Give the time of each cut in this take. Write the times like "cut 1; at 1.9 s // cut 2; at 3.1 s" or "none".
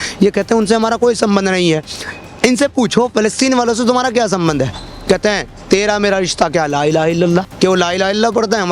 cut 1; at 7.5 s